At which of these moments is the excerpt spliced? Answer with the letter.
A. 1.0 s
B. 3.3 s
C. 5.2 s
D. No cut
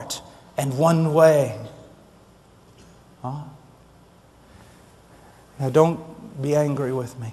B